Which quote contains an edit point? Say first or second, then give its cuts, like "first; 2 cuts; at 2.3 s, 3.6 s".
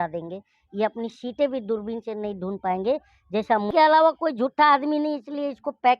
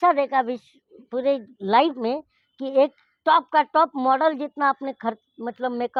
first; 1 cut; at 3.7 s